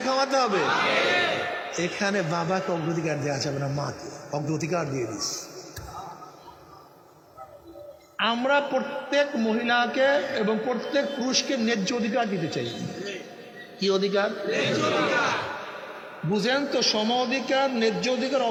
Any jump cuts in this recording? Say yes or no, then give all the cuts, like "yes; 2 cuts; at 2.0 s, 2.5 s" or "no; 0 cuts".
no; 0 cuts